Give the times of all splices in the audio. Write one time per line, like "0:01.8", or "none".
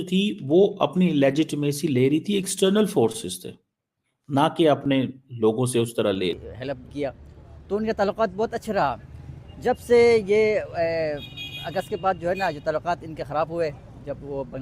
0:06.5